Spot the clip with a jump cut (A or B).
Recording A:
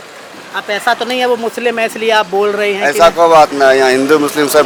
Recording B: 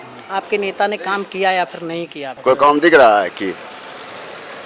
B